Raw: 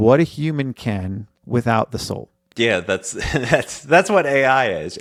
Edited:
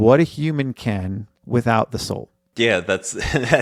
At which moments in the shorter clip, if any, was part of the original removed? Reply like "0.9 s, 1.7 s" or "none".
none